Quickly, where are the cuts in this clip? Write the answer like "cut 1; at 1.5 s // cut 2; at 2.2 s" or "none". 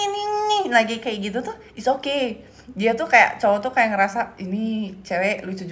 none